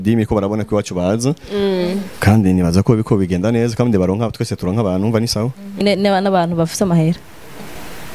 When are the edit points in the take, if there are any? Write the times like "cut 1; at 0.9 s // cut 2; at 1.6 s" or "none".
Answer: cut 1; at 5.8 s